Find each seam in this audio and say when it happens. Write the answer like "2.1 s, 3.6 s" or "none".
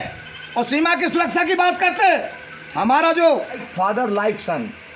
3.7 s